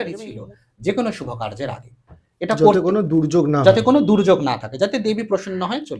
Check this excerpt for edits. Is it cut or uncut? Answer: uncut